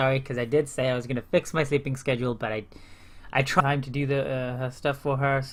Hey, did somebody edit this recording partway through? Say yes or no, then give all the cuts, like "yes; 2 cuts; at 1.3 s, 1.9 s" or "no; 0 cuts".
no; 0 cuts